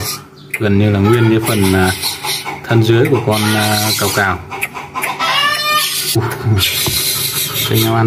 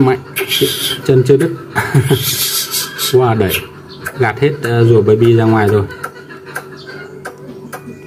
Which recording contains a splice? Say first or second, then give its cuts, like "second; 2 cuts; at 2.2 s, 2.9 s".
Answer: first; 1 cut; at 6.2 s